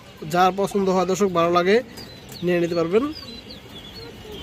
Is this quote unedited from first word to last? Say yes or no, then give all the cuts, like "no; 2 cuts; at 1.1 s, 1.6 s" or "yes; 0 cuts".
yes; 0 cuts